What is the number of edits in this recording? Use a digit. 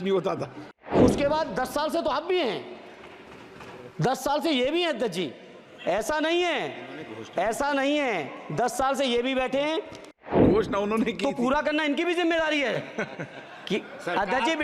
2